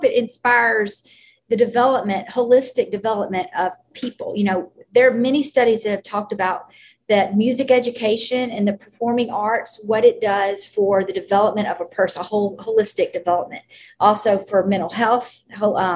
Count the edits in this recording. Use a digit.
0